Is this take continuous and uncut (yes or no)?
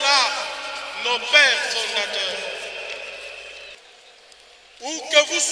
no